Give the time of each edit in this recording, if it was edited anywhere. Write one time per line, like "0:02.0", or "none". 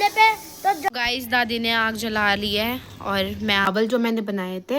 0:00.9
0:03.7